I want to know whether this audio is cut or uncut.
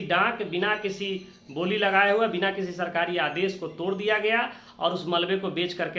uncut